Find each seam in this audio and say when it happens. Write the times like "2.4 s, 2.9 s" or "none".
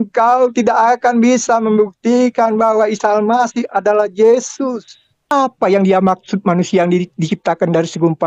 5.3 s